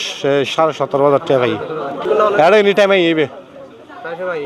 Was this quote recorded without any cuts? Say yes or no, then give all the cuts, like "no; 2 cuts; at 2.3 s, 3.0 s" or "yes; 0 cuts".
no; 1 cut; at 2.0 s